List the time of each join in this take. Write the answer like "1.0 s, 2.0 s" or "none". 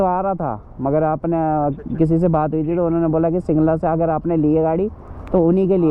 none